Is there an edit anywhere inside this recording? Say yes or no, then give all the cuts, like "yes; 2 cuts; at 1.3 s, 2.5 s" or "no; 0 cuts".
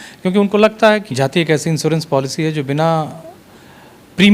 yes; 1 cut; at 1.0 s